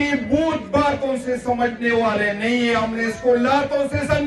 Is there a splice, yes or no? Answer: no